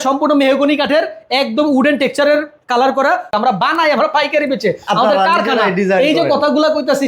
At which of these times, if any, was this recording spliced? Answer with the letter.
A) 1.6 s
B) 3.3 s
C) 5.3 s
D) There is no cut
B